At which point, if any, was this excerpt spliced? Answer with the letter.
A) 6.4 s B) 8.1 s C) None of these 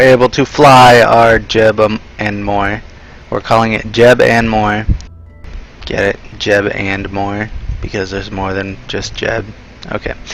B